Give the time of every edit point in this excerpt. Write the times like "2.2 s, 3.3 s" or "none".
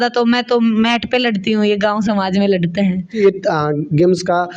none